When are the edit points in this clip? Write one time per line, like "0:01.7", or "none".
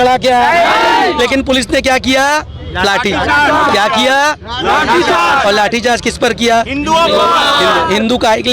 none